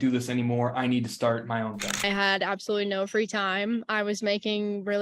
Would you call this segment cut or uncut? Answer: cut